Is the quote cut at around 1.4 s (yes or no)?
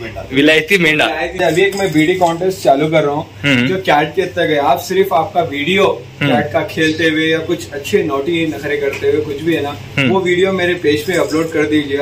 yes